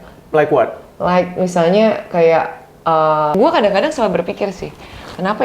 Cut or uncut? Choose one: cut